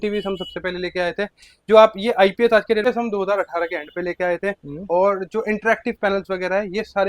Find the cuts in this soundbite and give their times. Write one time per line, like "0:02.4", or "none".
0:02.8